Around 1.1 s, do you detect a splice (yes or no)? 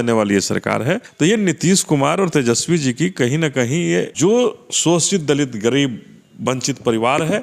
yes